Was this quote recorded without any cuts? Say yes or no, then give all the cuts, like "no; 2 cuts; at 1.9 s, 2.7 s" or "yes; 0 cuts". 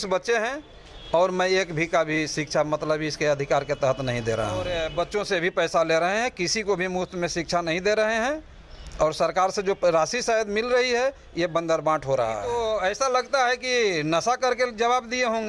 no; 2 cuts; at 4.7 s, 12.5 s